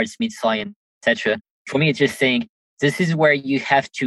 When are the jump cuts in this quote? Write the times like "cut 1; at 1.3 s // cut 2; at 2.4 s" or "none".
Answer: cut 1; at 1.2 s